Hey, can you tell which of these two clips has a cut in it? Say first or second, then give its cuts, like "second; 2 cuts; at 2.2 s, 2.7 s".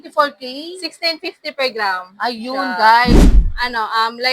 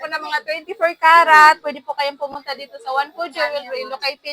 first; 1 cut; at 3.2 s